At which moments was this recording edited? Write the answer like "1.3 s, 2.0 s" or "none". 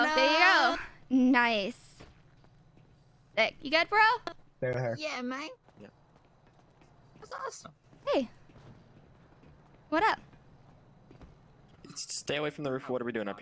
none